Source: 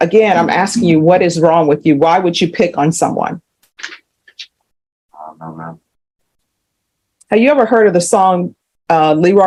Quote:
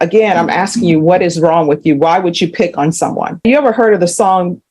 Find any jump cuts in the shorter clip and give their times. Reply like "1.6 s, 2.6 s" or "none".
3.4 s